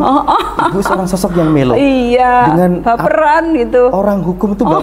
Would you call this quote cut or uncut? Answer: uncut